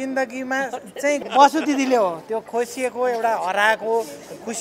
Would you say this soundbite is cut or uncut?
cut